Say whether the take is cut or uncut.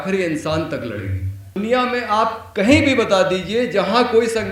cut